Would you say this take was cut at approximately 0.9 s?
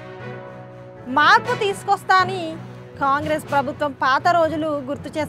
yes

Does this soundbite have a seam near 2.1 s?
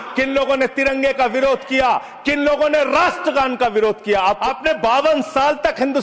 no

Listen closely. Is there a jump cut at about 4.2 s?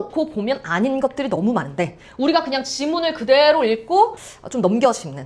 yes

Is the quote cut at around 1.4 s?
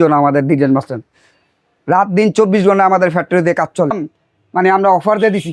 no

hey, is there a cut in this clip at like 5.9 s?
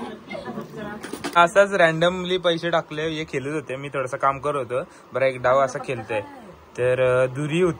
no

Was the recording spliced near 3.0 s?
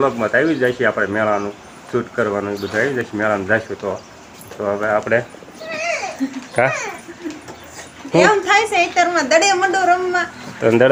no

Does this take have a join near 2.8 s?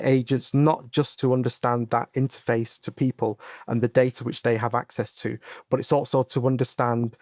yes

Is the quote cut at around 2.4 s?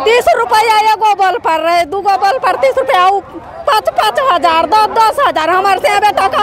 no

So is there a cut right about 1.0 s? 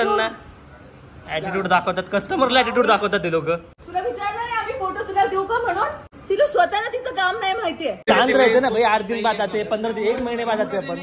no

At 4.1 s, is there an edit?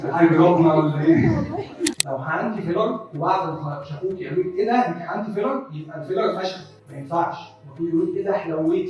no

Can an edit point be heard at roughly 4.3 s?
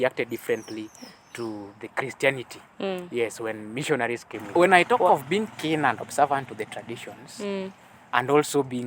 yes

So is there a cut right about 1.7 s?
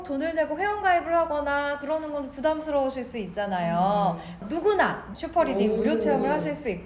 no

